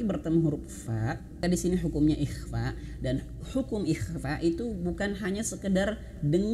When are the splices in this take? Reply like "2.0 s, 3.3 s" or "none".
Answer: 1.4 s